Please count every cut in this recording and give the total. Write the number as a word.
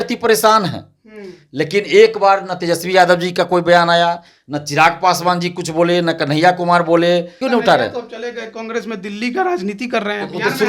one